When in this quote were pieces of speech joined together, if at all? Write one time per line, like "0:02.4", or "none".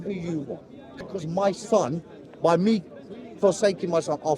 0:01.0